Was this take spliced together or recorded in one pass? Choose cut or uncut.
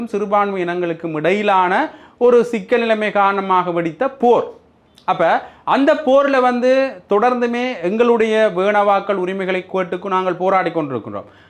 uncut